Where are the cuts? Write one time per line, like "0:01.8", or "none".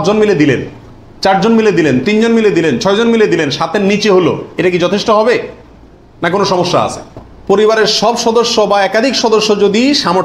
0:07.3